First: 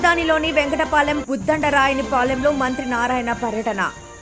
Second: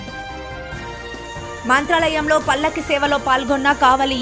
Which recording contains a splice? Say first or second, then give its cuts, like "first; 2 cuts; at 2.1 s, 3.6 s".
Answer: second; 1 cut; at 1.6 s